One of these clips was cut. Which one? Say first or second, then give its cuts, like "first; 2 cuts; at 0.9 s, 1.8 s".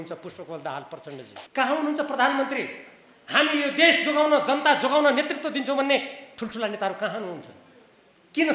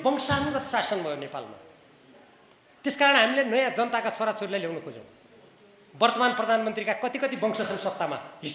first; 1 cut; at 1.3 s